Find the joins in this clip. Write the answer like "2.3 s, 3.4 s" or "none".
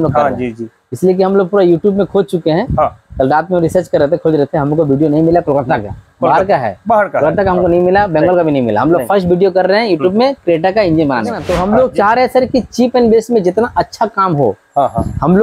11.4 s